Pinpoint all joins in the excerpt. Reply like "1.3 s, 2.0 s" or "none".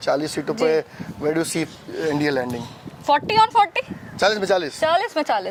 none